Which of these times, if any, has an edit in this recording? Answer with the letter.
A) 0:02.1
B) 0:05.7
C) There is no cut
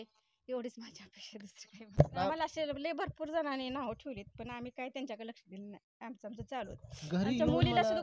A